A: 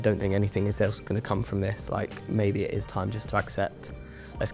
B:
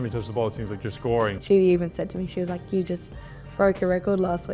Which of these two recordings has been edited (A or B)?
B